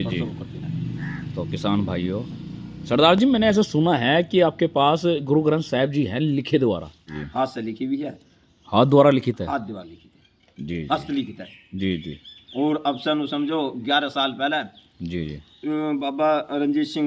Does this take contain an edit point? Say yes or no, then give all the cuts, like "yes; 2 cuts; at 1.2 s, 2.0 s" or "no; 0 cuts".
yes; 1 cut; at 7.0 s